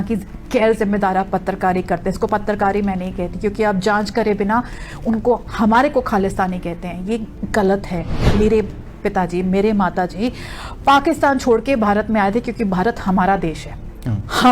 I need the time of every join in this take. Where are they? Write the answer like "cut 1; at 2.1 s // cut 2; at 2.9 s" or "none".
cut 1; at 8.1 s